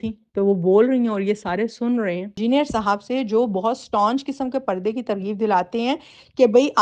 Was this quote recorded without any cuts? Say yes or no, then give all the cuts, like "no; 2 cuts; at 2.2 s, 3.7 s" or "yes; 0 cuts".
no; 1 cut; at 2.4 s